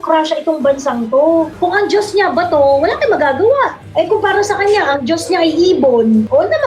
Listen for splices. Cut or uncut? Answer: cut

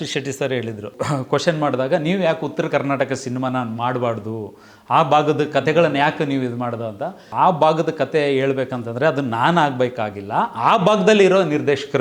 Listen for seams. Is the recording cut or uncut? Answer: cut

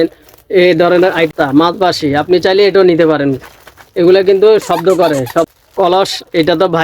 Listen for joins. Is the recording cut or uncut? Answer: cut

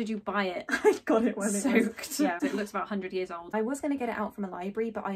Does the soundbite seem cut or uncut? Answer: cut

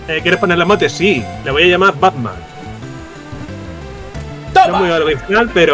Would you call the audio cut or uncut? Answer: uncut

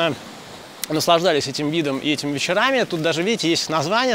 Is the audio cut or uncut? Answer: uncut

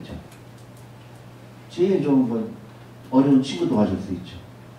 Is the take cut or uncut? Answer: uncut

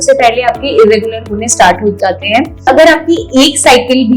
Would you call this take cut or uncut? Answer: cut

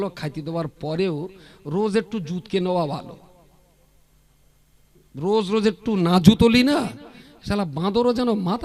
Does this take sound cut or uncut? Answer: uncut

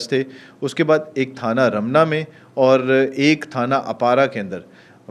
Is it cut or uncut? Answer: uncut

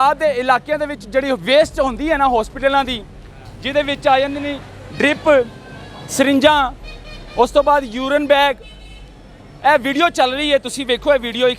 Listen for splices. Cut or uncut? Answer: uncut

